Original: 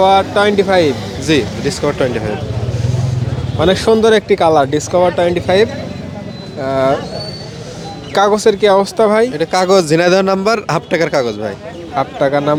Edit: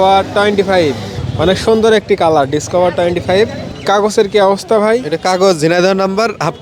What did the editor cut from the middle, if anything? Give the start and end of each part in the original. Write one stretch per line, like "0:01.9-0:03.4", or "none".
0:01.1-0:03.3
0:05.9-0:08.0